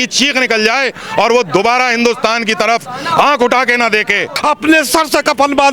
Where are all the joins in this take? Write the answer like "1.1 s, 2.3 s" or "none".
4.3 s

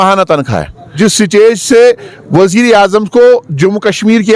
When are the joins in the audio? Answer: 0.9 s

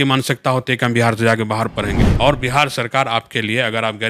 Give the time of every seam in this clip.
2.0 s

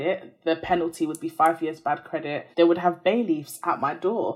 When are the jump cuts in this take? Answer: 2.4 s

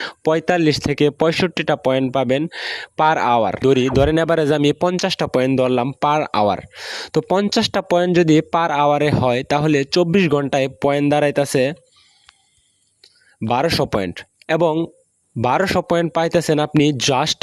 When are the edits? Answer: 3.6 s

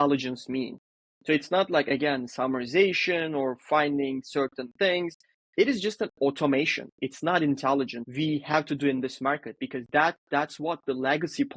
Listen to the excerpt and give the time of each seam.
8.0 s

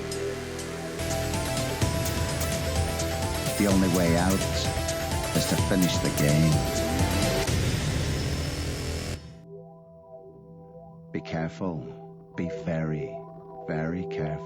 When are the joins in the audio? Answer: 1.0 s

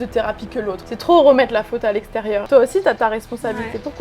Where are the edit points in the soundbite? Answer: 0.9 s, 2.4 s

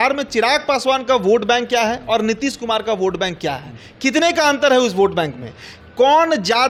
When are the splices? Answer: none

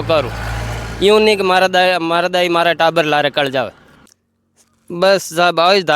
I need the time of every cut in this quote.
3.9 s

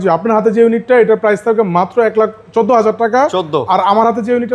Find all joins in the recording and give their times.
none

